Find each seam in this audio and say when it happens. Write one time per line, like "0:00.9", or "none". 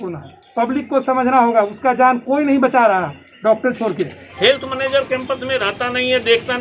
0:04.2